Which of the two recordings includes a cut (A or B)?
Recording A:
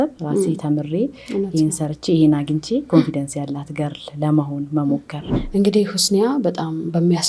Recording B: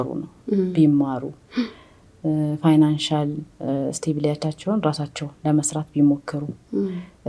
A